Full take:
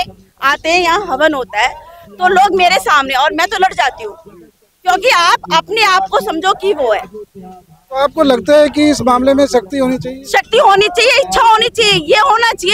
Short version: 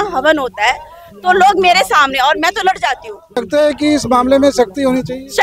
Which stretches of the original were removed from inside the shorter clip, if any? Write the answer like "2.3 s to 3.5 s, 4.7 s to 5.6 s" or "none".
4.3 s to 8.3 s